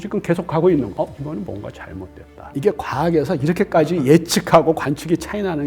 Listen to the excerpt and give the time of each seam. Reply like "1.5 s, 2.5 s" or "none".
0.9 s, 2.4 s